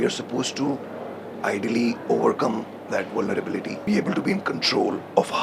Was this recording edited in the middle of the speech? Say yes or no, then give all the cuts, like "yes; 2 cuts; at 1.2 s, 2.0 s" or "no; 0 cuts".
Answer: yes; 1 cut; at 3.8 s